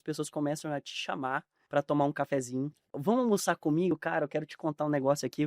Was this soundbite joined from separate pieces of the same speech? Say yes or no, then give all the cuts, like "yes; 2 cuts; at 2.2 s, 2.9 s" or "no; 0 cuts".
yes; 2 cuts; at 1.5 s, 3.0 s